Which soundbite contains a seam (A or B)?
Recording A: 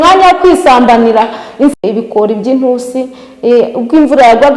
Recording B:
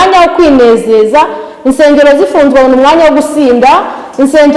A